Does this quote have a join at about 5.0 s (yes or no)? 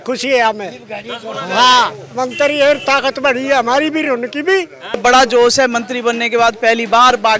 yes